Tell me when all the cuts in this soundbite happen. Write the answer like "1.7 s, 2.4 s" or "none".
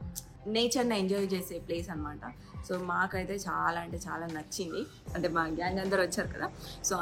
5.0 s